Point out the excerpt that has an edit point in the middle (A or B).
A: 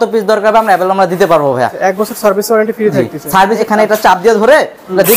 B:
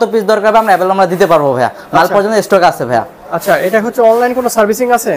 A